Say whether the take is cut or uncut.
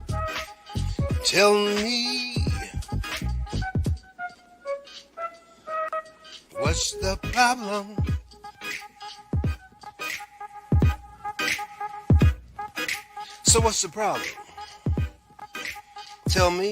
cut